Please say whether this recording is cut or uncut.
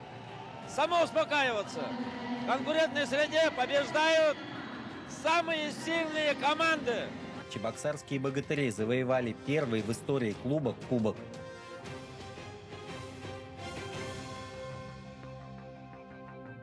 cut